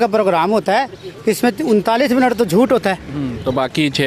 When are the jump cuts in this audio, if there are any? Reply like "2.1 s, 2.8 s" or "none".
none